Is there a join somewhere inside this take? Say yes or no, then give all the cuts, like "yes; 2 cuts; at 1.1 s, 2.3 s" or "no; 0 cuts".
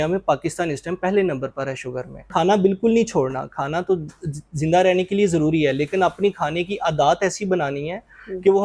yes; 1 cut; at 2.2 s